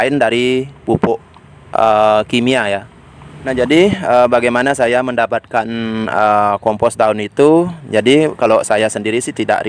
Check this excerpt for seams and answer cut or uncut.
cut